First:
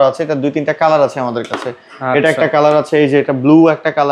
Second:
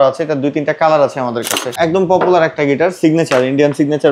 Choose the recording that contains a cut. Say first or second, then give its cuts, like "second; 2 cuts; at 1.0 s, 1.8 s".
second; 1 cut; at 1.7 s